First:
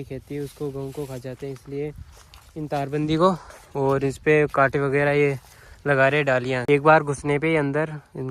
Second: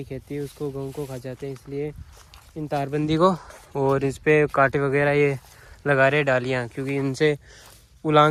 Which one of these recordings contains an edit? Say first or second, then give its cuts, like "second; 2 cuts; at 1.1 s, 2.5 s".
first; 1 cut; at 6.6 s